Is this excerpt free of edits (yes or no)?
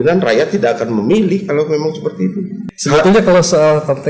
no